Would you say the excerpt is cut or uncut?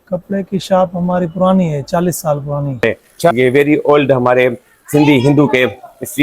cut